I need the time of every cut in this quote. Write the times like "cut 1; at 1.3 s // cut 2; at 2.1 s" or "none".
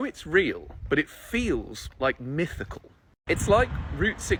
none

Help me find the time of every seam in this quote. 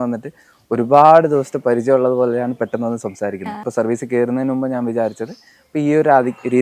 cut 1; at 3.6 s

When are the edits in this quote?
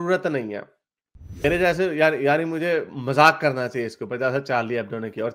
cut 1; at 1.4 s

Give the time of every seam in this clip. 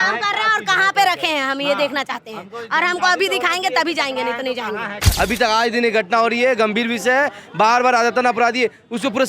cut 1; at 5.0 s

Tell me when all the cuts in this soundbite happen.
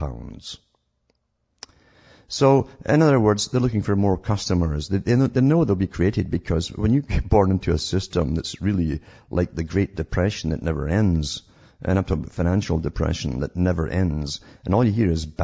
cut 1; at 5.7 s

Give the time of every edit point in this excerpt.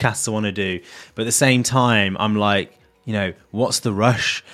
none

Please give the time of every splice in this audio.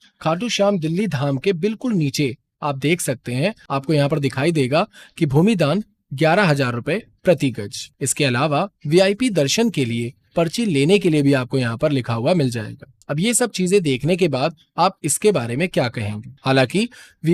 none

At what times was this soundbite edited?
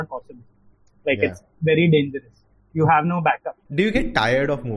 cut 1; at 3.6 s

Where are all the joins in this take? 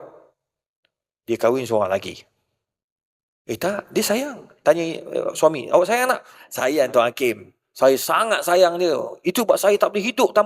cut 1; at 6.4 s

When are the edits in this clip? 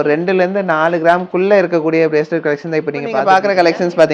cut 1; at 3.2 s

